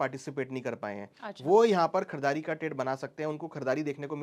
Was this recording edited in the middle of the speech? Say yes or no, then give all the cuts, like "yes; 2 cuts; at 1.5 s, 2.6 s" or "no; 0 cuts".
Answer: no; 0 cuts